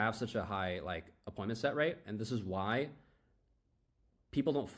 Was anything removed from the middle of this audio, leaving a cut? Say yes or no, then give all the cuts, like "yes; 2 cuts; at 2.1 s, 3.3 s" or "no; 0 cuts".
no; 0 cuts